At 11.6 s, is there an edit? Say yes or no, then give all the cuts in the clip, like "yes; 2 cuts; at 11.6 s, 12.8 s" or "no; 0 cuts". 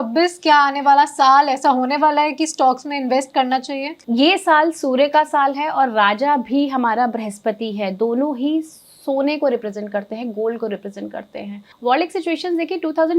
yes; 2 cuts; at 3.9 s, 11.6 s